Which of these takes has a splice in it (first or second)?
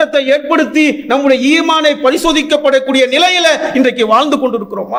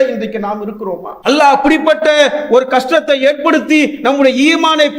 second